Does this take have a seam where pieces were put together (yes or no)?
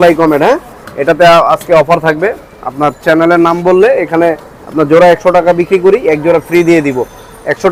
no